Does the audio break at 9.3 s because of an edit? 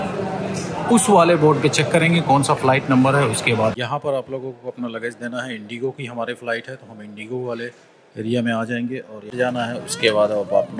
yes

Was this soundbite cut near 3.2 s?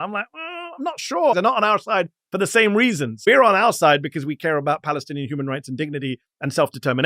yes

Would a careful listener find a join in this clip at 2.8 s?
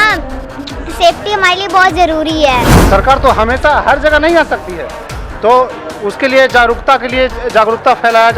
yes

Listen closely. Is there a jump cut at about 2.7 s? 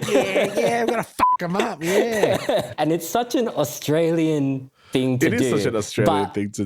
yes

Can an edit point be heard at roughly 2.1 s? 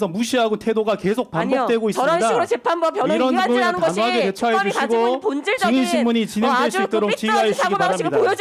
no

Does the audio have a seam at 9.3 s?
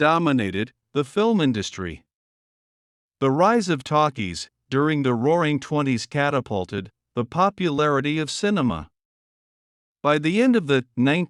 no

